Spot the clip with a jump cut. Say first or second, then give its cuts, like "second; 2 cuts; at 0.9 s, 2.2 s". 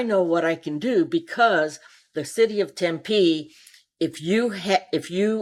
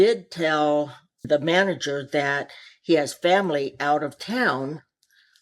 second; 1 cut; at 1.2 s